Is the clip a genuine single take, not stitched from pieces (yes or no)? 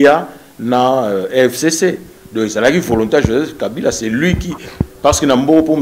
no